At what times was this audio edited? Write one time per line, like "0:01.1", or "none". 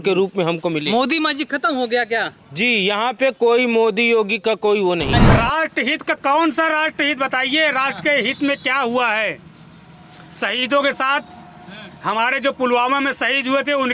0:05.1